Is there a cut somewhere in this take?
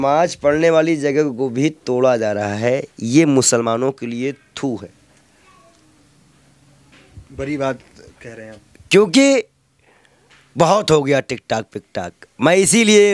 no; 0 cuts

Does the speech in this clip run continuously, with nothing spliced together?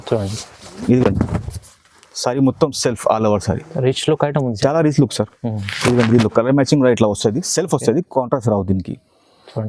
yes; 0 cuts

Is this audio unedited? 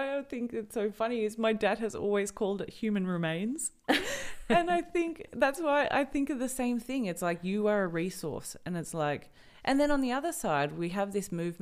yes; 0 cuts

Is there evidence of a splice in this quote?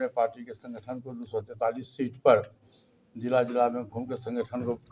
no; 0 cuts

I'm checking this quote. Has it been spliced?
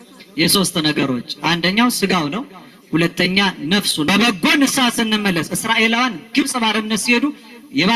yes; 1 cut; at 4.1 s

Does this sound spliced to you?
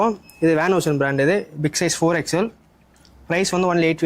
no; 0 cuts

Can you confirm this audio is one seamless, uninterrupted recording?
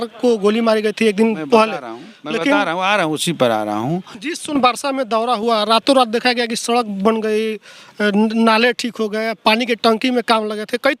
no; 1 cut; at 4.1 s

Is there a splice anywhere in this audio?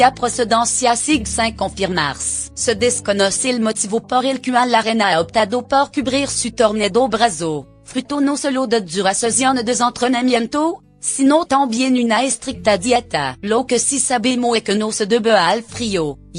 yes; 1 cut; at 7.2 s

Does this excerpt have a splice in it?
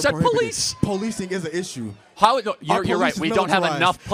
no; 0 cuts

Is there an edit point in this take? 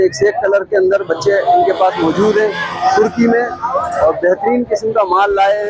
no; 0 cuts

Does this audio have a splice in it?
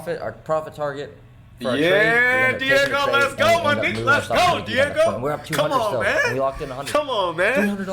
no; 0 cuts

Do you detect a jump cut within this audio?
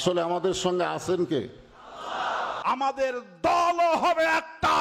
yes; 1 cut; at 2.5 s

